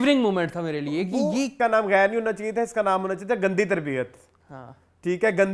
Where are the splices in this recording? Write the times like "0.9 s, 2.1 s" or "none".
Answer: 1.5 s